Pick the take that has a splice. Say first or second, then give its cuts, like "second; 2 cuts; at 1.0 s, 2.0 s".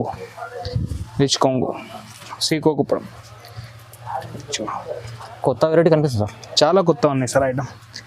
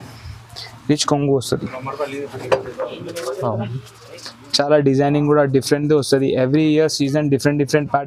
first; 1 cut; at 2.3 s